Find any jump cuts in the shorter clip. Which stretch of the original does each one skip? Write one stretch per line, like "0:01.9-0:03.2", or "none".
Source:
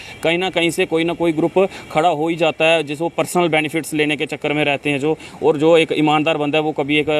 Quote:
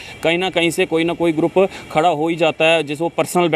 none